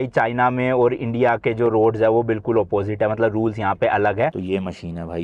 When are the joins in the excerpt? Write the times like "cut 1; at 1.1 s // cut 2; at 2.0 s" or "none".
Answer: cut 1; at 4.3 s